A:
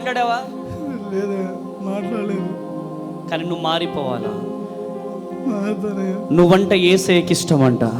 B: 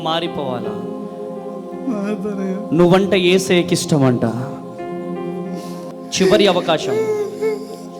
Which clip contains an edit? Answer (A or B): B